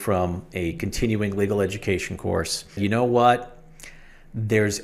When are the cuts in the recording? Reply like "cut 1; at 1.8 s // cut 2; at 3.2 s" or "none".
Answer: cut 1; at 2.8 s